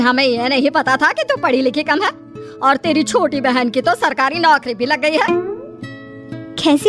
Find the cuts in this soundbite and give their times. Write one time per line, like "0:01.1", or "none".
none